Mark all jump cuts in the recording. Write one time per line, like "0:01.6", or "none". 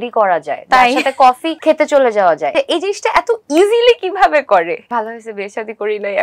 0:01.5
0:02.5
0:04.8

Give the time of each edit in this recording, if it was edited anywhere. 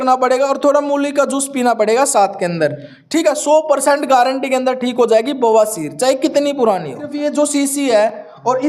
0:07.1

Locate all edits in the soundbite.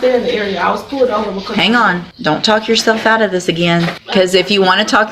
0:02.1
0:04.0

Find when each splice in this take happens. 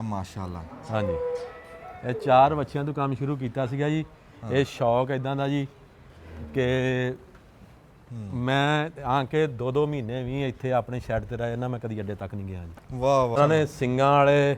0:13.4

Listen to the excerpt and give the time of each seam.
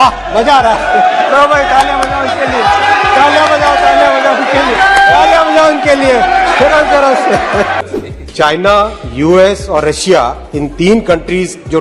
0:07.8

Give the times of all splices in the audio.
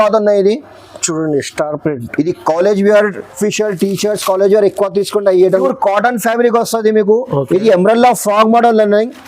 0:03.3
0:05.5

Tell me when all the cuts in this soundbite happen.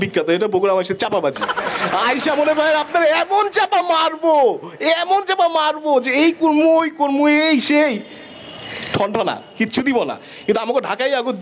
none

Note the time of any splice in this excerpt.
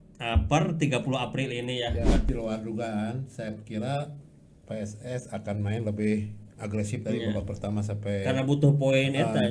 0:02.3

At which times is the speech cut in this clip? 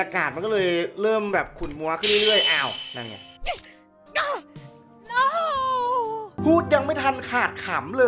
0:06.3

